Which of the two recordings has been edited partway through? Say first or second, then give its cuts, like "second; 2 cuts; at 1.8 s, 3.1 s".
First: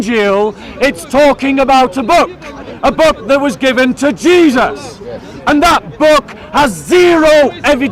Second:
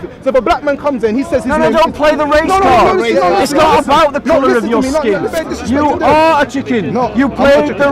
second; 1 cut; at 5.4 s